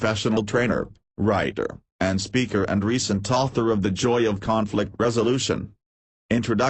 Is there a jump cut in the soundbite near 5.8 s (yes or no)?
yes